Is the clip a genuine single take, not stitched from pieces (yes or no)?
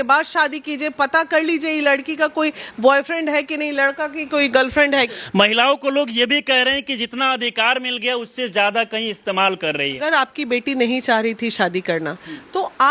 no